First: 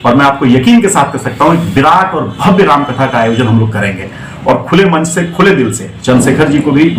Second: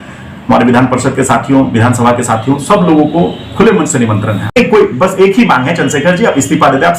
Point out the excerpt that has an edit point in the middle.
second; 1 cut; at 4.5 s

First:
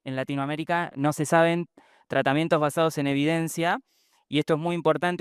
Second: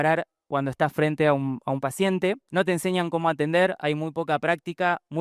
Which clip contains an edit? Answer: second; 1 cut; at 2.4 s

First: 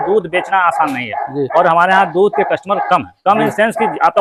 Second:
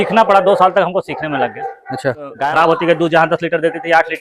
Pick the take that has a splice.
second; 1 cut; at 2.4 s

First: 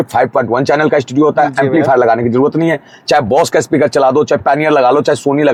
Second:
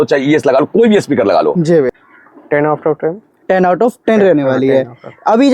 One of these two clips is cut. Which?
second; 1 cut; at 1.9 s

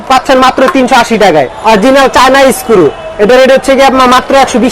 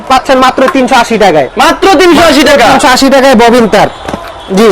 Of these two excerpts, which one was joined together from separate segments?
first; 1 cut; at 1.5 s

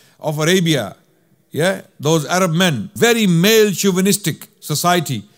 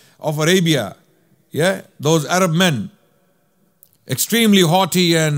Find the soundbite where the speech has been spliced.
first; 1 cut; at 2.9 s

